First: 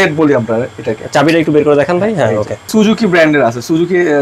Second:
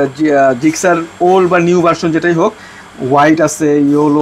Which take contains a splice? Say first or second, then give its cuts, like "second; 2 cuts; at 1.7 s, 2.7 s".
first; 1 cut; at 2.7 s